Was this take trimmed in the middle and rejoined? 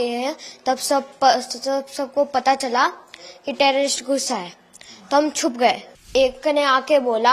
yes; 1 cut; at 6.1 s

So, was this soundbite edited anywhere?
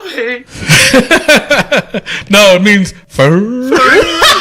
yes; 1 cut; at 3.0 s

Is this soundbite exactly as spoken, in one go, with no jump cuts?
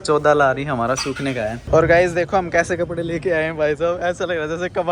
no; 1 cut; at 1.6 s

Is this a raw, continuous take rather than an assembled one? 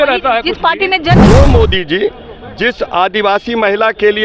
no; 1 cut; at 1.2 s

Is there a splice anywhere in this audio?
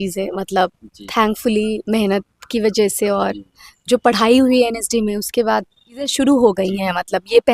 yes; 1 cut; at 6.1 s

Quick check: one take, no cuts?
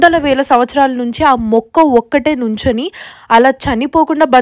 no; 1 cut; at 3.1 s

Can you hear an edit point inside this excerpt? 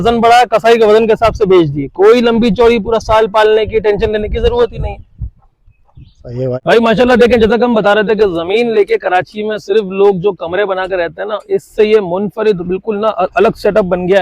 yes; 1 cut; at 6.5 s

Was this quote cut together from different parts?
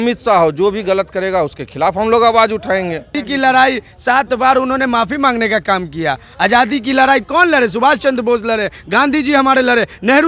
yes; 1 cut; at 3.2 s

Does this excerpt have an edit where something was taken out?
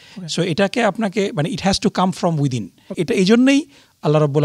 yes; 1 cut; at 2.9 s

